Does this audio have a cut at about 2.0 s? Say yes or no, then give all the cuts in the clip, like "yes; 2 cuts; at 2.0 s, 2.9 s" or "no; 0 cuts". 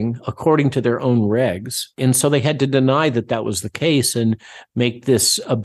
yes; 1 cut; at 2.0 s